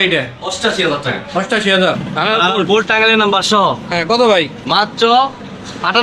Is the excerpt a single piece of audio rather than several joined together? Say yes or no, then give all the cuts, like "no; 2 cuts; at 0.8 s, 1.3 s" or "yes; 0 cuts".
no; 1 cut; at 2.1 s